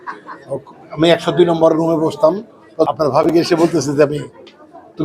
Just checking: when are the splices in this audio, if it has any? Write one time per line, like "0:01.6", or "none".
0:02.9